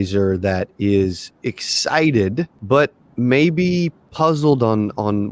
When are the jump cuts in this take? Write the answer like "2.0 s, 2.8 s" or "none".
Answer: 2.6 s, 4.0 s

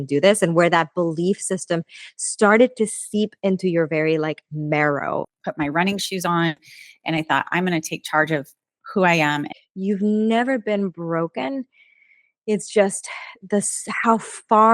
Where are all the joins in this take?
5.3 s, 9.6 s

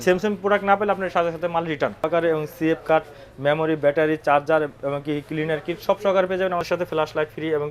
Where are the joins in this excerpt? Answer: 2.1 s, 6.6 s

